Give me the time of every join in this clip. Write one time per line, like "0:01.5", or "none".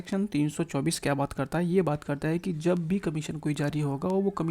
none